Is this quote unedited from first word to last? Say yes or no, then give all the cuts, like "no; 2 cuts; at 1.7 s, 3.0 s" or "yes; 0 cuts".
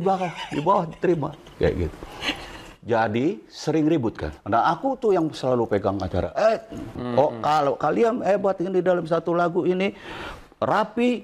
no; 2 cuts; at 4.3 s, 7.0 s